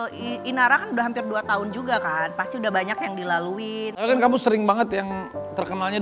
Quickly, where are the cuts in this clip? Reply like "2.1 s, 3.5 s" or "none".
4.0 s